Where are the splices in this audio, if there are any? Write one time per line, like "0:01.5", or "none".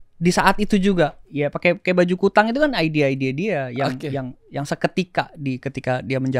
0:01.2
0:04.4